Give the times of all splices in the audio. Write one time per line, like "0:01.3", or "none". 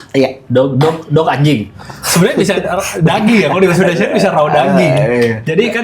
0:01.8